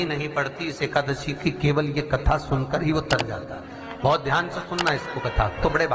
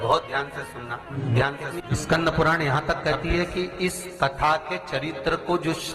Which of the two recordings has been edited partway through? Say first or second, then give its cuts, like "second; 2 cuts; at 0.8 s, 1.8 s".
second; 2 cuts; at 1.1 s, 1.8 s